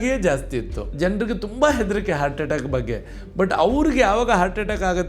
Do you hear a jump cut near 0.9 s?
yes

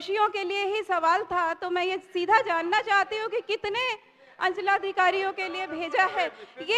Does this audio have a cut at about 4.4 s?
no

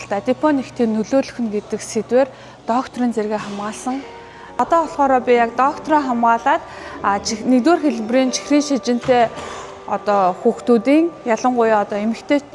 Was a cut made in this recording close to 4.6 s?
yes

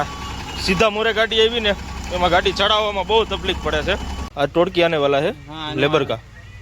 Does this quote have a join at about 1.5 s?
no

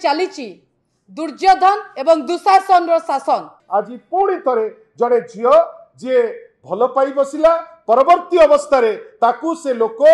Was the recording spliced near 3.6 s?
yes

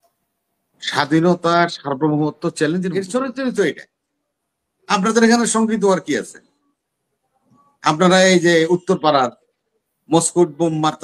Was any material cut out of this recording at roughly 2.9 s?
yes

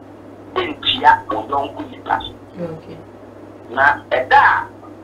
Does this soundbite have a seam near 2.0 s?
no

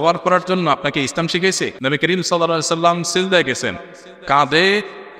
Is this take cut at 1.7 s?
yes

